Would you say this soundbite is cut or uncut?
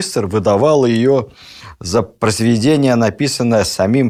uncut